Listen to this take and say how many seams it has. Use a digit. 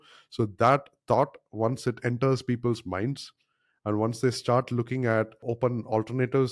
1